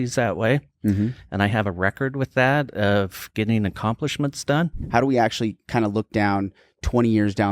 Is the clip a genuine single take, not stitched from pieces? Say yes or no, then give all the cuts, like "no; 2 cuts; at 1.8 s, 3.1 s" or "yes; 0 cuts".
no; 1 cut; at 4.8 s